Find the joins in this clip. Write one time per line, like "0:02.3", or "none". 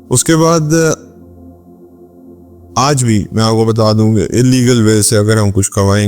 0:01.0
0:02.6